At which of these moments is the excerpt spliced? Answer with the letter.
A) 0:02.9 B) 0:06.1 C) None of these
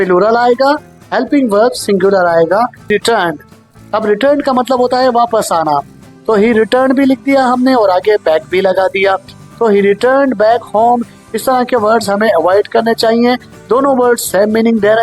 A